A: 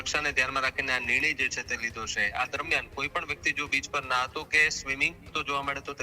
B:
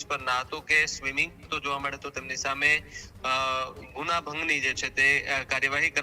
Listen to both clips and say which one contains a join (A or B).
A